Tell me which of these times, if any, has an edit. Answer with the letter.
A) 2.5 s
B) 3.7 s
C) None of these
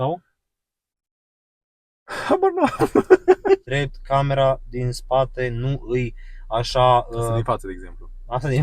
B